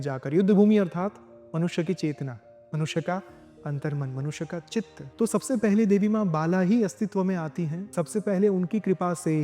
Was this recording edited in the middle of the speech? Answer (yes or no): yes